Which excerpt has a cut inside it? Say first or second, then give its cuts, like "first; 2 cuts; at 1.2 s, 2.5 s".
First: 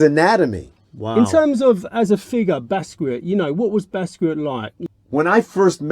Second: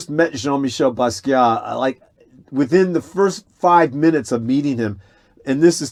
first; 2 cuts; at 1.1 s, 4.7 s